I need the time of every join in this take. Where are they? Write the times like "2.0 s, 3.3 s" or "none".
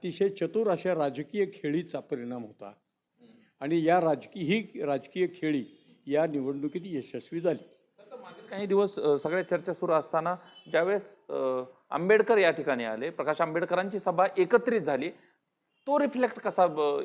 none

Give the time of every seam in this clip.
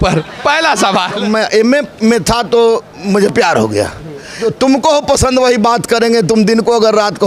1.2 s, 4.4 s

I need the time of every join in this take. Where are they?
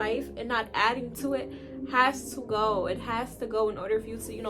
none

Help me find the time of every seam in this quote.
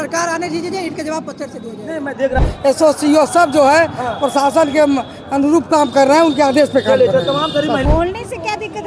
2.4 s, 7.8 s

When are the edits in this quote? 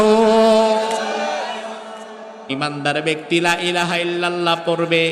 2.5 s

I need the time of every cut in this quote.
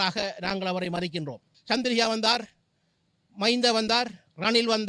1.5 s

